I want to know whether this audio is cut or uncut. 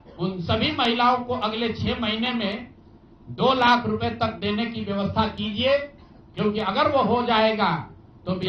uncut